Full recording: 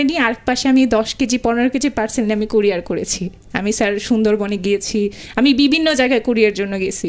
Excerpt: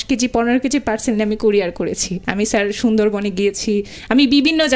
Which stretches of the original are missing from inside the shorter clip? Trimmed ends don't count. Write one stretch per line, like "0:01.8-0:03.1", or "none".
0:03.3-0:03.4